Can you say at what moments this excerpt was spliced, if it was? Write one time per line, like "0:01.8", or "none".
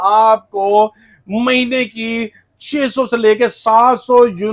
none